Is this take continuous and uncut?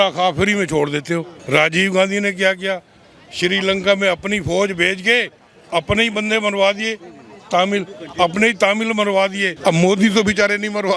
no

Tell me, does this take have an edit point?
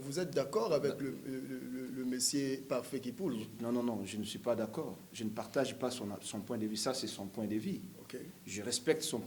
no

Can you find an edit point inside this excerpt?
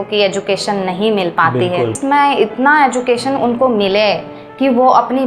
yes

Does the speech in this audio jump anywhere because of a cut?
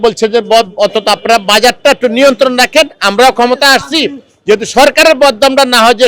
no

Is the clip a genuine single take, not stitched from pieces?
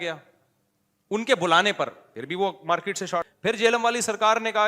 no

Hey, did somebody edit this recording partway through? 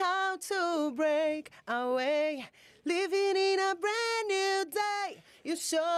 no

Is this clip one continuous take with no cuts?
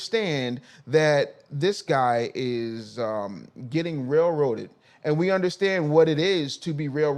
yes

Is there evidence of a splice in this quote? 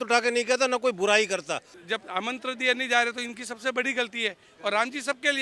yes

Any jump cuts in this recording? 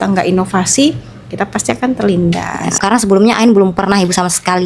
yes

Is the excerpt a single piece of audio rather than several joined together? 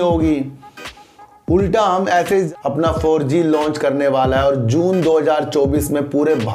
no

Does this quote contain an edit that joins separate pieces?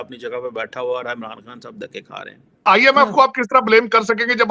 yes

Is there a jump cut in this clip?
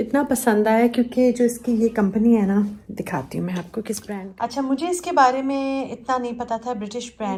no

